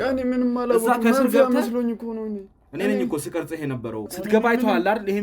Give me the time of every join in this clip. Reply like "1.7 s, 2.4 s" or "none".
4.1 s